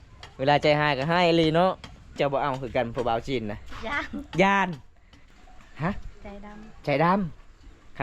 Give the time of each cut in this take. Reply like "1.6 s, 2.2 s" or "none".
2.1 s, 5.2 s